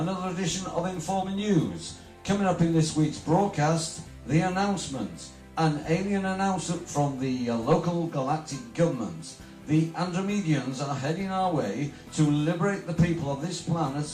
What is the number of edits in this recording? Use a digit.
1